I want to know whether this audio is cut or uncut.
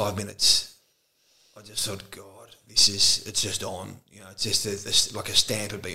uncut